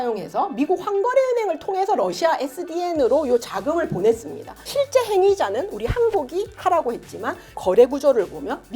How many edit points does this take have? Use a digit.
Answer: 2